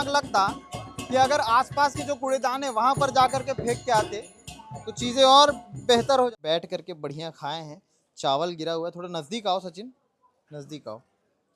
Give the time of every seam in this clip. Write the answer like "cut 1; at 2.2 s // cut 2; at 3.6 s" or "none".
cut 1; at 6.3 s